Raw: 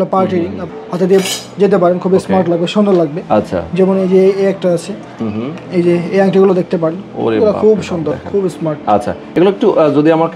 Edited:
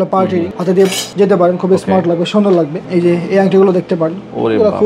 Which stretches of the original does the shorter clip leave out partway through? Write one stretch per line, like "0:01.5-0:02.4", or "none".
0:00.9-0:01.3
0:03.2-0:05.6